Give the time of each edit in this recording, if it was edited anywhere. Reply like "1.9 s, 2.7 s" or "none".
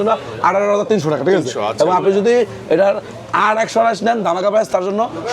none